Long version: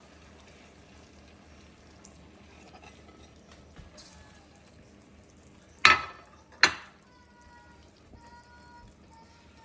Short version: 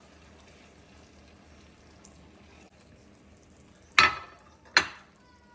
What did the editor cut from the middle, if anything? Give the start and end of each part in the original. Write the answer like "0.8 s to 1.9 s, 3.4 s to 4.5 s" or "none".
2.7 s to 4.6 s